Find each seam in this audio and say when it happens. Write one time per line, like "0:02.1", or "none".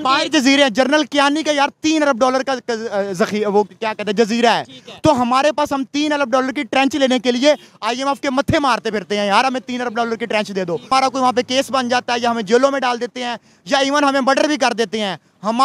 0:10.9